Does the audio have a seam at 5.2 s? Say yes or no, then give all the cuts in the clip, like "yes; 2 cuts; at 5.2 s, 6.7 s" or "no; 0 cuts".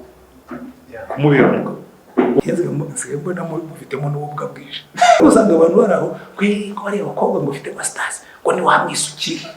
yes; 2 cuts; at 2.4 s, 5.2 s